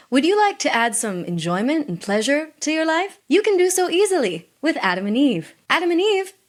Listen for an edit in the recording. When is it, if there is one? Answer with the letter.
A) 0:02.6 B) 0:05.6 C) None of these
C